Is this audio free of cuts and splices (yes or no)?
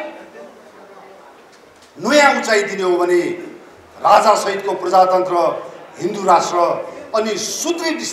yes